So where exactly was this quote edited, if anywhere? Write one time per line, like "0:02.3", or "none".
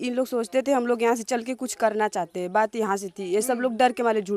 none